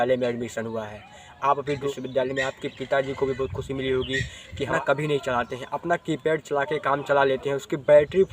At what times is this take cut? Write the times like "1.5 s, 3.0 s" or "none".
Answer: 1.9 s, 4.7 s